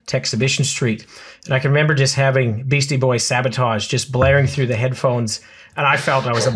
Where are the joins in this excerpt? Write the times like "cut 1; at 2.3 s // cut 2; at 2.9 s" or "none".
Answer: none